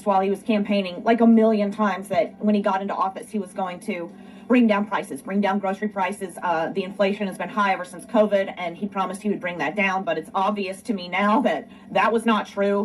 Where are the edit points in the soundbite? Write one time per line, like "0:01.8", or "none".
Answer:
none